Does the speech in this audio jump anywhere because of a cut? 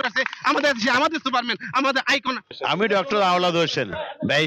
yes; 1 cut; at 2.4 s

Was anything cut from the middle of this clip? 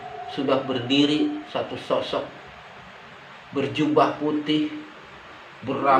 no; 0 cuts

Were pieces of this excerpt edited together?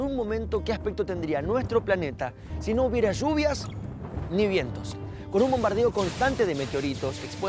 yes; 1 cut; at 3.1 s

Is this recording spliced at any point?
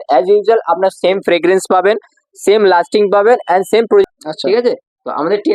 yes; 1 cut; at 4.0 s

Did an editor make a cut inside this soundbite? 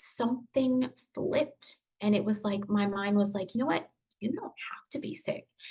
no; 0 cuts

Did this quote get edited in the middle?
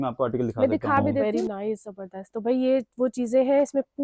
yes; 1 cut; at 1.2 s

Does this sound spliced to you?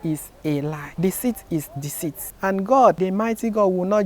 yes; 2 cuts; at 2.3 s, 3.0 s

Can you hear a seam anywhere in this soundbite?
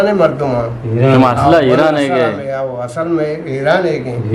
no; 0 cuts

